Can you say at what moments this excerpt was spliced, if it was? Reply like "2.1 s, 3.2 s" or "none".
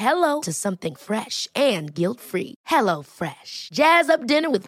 none